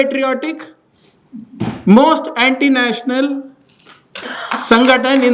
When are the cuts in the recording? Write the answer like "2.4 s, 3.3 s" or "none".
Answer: none

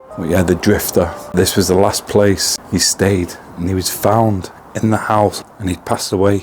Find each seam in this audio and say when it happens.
2.5 s, 5.4 s

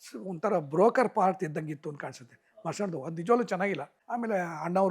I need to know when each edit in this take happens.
4.0 s

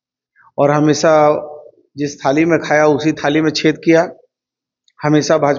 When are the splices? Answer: none

